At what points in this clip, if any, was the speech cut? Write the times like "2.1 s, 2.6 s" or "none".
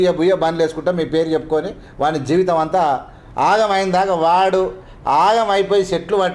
none